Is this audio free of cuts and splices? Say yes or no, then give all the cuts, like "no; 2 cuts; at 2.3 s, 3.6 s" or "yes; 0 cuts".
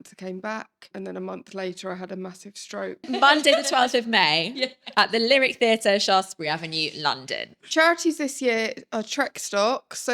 no; 3 cuts; at 0.9 s, 3.0 s, 7.5 s